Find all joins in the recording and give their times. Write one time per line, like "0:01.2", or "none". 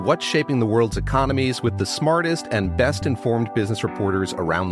none